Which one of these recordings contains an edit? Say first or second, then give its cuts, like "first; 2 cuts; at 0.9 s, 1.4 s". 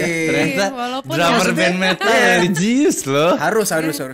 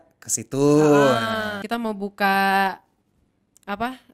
second; 1 cut; at 1.6 s